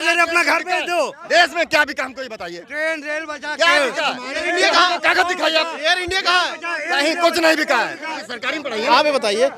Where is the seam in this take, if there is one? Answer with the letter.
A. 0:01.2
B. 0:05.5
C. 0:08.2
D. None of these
C